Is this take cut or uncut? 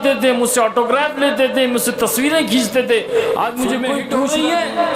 cut